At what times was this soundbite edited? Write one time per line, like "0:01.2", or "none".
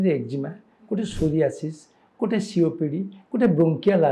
none